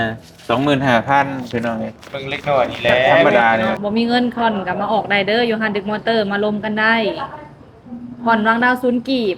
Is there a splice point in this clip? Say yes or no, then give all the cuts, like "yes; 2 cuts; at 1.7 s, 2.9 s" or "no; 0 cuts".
yes; 1 cut; at 3.8 s